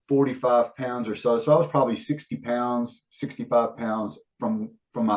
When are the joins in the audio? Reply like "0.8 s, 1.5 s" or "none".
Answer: none